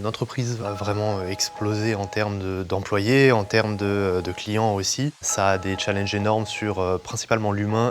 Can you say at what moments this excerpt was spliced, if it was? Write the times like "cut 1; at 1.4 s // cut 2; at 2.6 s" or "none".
cut 1; at 5.3 s

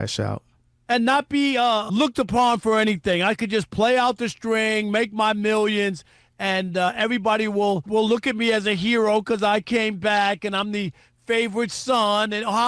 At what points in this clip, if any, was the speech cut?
cut 1; at 1.9 s // cut 2; at 7.9 s

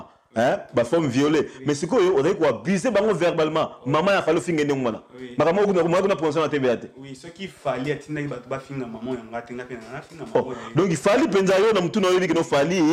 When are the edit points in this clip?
none

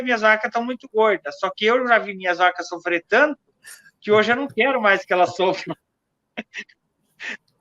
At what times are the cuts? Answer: none

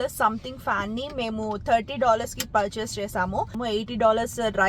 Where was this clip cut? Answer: cut 1; at 3.6 s

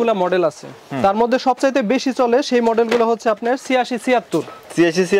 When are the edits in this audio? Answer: none

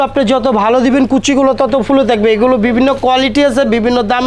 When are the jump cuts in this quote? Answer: none

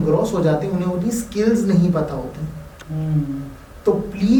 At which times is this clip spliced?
none

